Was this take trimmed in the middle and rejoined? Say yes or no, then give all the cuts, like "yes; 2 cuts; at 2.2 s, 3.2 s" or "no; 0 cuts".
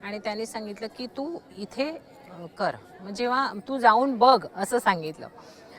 no; 0 cuts